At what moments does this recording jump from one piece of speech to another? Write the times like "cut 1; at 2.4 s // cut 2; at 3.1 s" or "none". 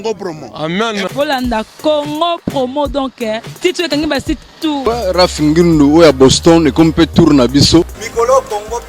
cut 1; at 4.8 s // cut 2; at 8.0 s